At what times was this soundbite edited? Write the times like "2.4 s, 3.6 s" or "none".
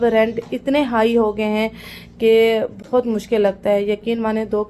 none